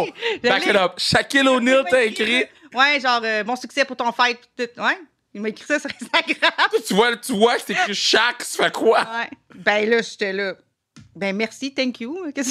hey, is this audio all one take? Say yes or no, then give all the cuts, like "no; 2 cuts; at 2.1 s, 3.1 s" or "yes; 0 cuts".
yes; 0 cuts